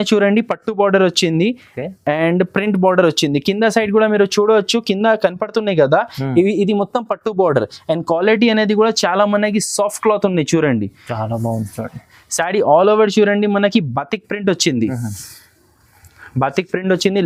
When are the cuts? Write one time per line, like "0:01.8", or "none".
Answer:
none